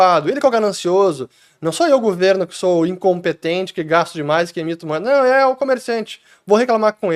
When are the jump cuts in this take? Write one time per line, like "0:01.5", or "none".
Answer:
none